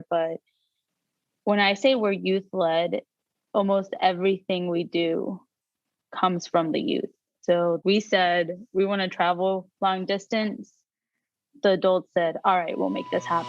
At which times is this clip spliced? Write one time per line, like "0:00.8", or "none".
0:09.7